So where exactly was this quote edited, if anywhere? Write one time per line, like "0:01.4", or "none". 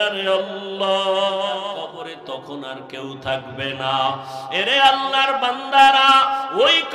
0:01.7